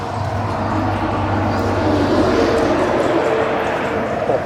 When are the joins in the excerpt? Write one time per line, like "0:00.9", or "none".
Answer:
none